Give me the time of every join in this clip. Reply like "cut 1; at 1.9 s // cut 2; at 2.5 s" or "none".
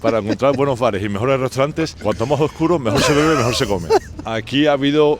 cut 1; at 2.0 s // cut 2; at 4.2 s